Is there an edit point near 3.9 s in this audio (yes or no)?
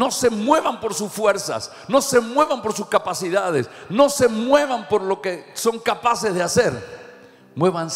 no